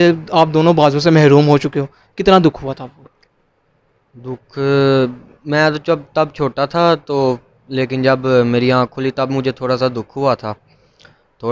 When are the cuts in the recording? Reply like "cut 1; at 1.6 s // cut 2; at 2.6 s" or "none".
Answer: none